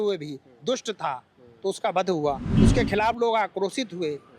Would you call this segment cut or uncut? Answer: cut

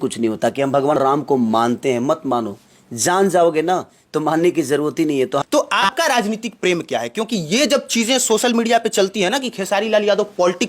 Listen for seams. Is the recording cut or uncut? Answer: cut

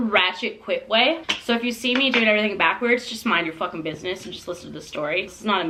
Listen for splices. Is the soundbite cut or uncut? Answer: uncut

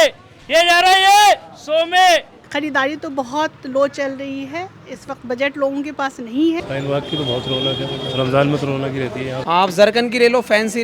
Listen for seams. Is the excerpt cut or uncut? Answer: cut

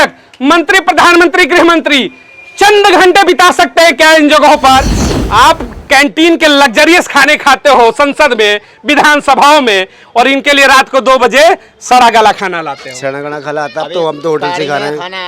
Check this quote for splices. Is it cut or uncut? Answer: cut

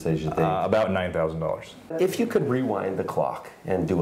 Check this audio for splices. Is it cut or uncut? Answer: cut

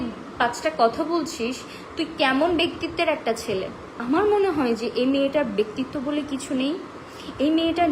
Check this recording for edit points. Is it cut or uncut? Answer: cut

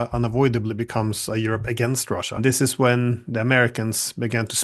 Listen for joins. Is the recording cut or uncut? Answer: cut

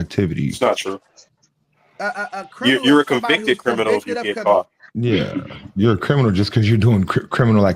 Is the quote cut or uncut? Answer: uncut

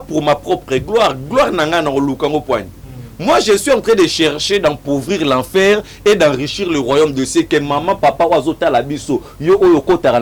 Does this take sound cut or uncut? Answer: uncut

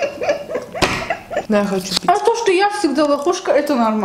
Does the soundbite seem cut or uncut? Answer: cut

